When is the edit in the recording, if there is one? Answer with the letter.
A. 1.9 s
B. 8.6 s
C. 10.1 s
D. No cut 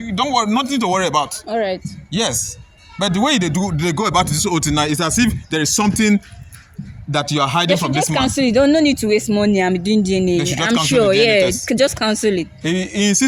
D